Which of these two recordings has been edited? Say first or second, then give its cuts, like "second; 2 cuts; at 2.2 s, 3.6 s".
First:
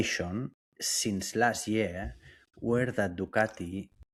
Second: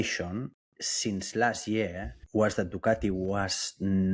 second; 1 cut; at 2.2 s